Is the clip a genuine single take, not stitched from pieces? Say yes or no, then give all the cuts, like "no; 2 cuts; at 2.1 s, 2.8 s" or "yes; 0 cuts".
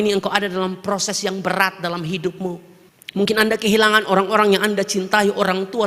yes; 0 cuts